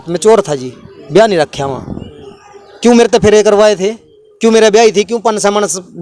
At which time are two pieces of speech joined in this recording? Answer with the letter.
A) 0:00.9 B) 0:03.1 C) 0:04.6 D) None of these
D